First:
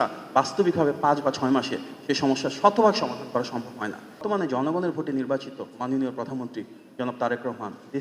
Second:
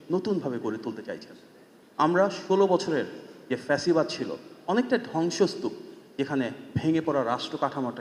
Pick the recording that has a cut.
first; 1 cut; at 4.2 s

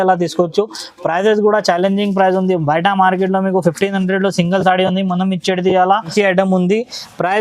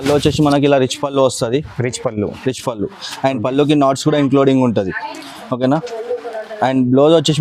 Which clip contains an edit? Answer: first; 1 cut; at 6.1 s

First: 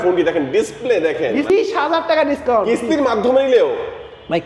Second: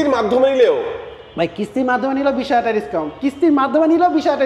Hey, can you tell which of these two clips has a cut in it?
first; 1 cut; at 1.5 s

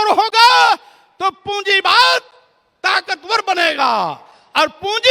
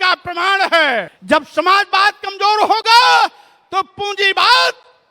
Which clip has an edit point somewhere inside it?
second; 1 cut; at 1.1 s

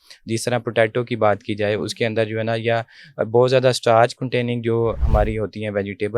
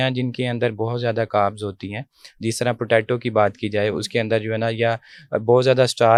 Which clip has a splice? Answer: first; 1 cut; at 5.0 s

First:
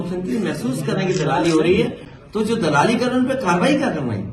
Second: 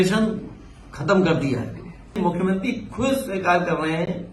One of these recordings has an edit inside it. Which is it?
second; 1 cut; at 2.1 s

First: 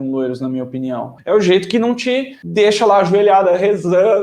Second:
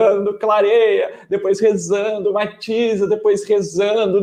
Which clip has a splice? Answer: first; 1 cut; at 2.4 s

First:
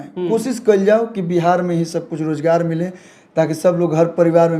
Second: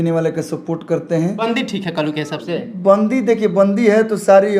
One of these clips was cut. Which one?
second; 1 cut; at 1.4 s

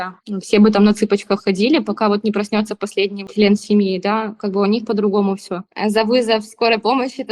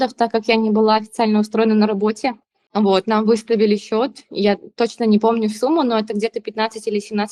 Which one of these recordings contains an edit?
first; 1 cut; at 5.5 s

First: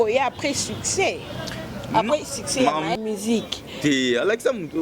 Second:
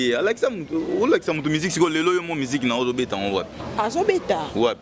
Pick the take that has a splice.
first; 1 cut; at 3.0 s

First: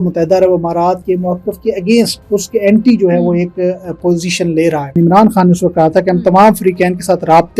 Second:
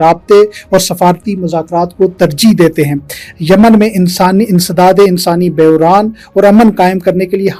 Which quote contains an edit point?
first; 3 cuts; at 1.0 s, 2.2 s, 5.0 s

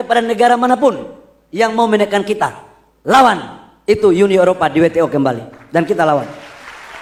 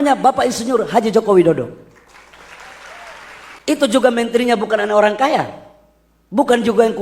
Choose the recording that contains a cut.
second; 1 cut; at 3.6 s

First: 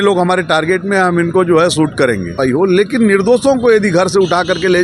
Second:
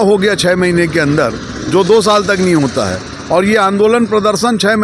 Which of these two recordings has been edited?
first; 1 cut; at 2.4 s

